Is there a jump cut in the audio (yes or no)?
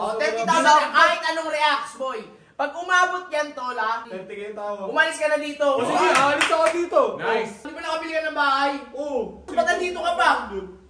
yes